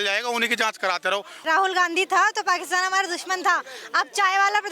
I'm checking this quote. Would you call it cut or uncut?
cut